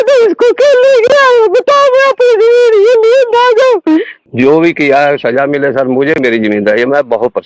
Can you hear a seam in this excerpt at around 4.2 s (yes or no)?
yes